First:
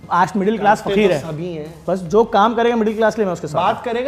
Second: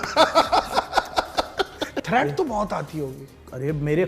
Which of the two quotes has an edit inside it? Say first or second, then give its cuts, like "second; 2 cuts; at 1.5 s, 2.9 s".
second; 1 cut; at 1.9 s